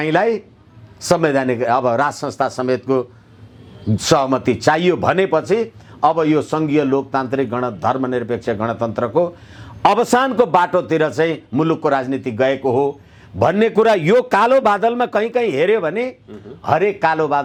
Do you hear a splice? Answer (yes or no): no